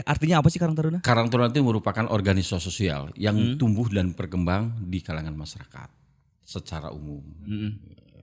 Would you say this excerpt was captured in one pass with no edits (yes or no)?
yes